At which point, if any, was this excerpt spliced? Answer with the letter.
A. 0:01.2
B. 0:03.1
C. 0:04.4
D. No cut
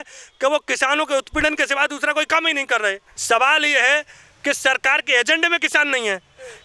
B